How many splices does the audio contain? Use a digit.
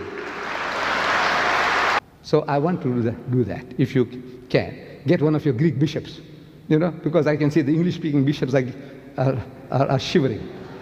1